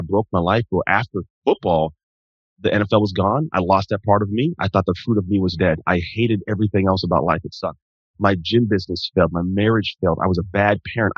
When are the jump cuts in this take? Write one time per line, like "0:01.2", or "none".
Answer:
0:01.3
0:05.5